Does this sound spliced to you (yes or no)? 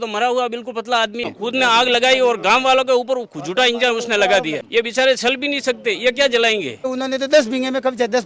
yes